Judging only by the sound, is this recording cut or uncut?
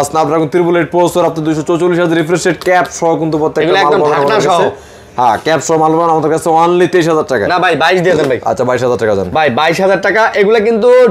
uncut